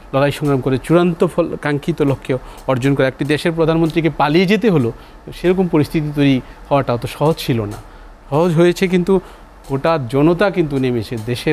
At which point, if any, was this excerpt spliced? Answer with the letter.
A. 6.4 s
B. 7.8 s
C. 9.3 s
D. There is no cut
D